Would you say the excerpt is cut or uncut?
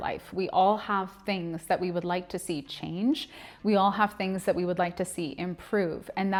uncut